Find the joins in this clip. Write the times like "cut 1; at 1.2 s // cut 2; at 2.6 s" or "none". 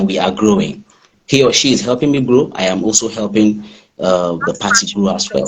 cut 1; at 1.1 s